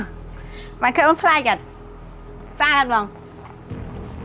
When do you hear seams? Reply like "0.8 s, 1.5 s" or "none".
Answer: 3.2 s